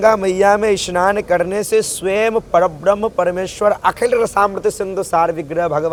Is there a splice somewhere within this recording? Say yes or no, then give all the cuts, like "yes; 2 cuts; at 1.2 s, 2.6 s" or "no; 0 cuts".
no; 0 cuts